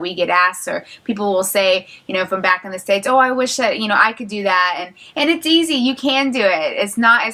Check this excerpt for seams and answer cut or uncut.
uncut